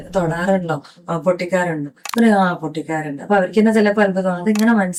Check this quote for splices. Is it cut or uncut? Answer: uncut